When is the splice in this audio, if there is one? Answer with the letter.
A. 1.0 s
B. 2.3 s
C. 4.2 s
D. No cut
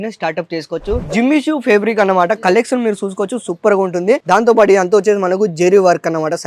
A